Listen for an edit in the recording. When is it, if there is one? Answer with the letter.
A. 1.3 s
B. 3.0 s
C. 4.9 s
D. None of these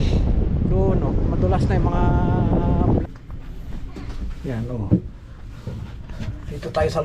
B